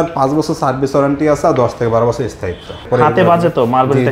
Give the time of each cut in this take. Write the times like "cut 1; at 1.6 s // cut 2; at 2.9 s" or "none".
cut 1; at 2.8 s